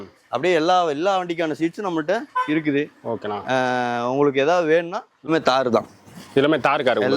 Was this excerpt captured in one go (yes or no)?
no